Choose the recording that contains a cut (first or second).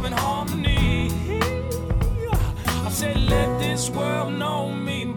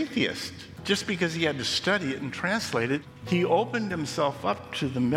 second